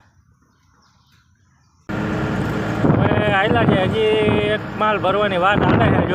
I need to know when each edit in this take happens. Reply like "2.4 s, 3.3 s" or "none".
1.9 s